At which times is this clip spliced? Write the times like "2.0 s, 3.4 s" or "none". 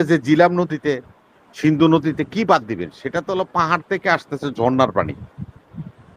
none